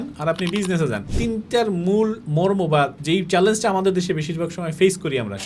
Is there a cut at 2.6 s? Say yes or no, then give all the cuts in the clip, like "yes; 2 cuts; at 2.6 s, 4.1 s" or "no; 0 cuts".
yes; 2 cuts; at 1.1 s, 2.6 s